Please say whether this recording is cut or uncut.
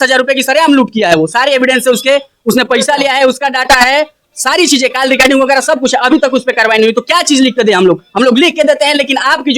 uncut